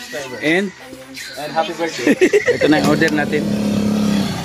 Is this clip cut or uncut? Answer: cut